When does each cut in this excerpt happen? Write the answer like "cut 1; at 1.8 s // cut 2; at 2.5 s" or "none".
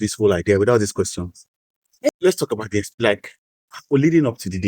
cut 1; at 2.1 s

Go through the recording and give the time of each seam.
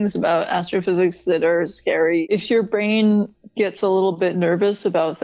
cut 1; at 2.2 s // cut 2; at 3.4 s

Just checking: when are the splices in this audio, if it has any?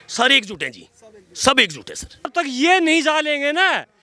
cut 1; at 2.3 s

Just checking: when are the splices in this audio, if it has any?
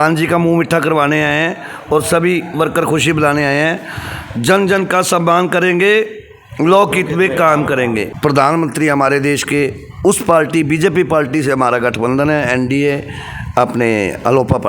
cut 1; at 8.1 s

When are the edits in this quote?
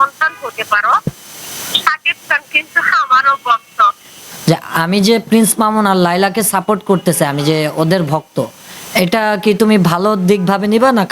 cut 1; at 4.2 s

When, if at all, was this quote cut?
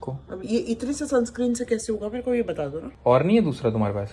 none

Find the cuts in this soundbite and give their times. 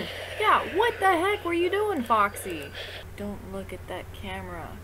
cut 1; at 3.0 s

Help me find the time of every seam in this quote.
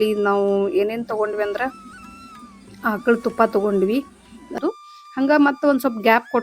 cut 1; at 4.6 s

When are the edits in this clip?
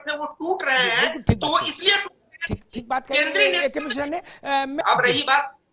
cut 1; at 4.8 s

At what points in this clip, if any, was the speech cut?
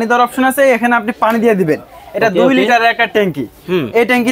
none

